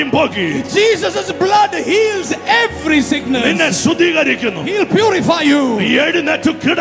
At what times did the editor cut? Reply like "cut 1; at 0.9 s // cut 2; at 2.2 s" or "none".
none